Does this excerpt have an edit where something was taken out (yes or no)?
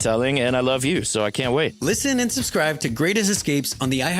yes